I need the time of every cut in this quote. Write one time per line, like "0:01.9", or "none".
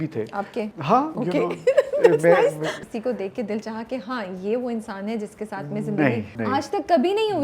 0:01.0
0:02.7
0:06.3